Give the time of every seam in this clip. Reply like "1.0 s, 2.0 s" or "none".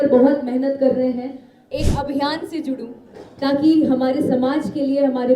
1.7 s